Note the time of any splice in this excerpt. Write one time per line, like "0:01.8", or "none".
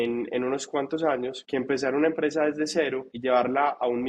0:01.4
0:03.1